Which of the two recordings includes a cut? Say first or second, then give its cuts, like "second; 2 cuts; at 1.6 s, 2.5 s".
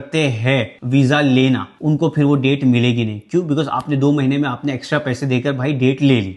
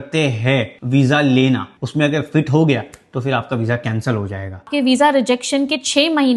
second; 2 cuts; at 1.7 s, 4.7 s